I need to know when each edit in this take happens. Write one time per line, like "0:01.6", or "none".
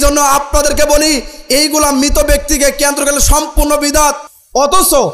none